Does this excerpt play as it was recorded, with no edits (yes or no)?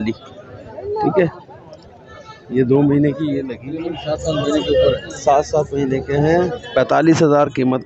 no